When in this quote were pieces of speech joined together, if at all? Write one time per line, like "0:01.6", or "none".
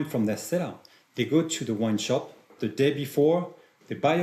0:02.5

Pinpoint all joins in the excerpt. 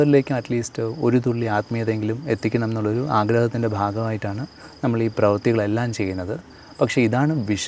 none

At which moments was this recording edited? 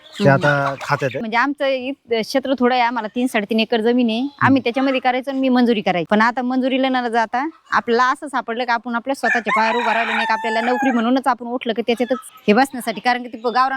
0:01.2
0:06.0
0:12.3

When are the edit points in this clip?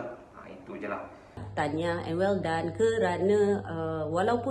0:01.4

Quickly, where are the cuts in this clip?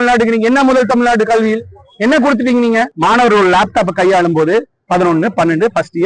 0:02.9

